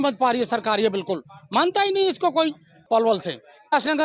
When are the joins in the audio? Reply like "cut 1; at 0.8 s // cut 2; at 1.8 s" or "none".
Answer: none